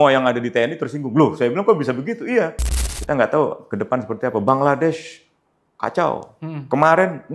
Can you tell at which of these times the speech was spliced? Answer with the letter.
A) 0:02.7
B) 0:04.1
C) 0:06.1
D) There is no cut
A